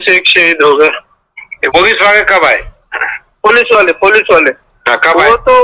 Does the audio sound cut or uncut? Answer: cut